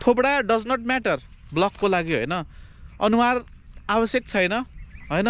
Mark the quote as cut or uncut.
uncut